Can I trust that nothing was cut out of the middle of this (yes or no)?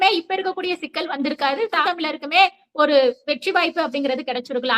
no